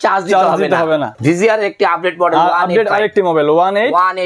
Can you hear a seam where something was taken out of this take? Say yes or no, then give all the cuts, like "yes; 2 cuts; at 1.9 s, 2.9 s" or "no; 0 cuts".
yes; 1 cut; at 1.1 s